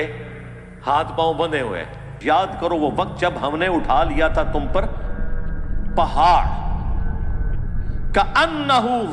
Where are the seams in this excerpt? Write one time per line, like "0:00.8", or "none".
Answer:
0:02.2